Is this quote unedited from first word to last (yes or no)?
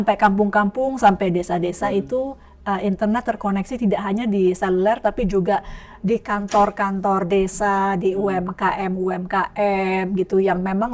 yes